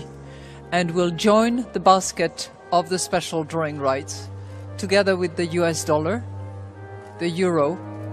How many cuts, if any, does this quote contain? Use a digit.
1